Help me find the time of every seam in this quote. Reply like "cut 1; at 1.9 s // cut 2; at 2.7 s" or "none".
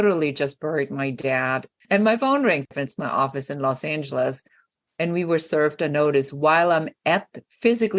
cut 1; at 1.7 s // cut 2; at 2.7 s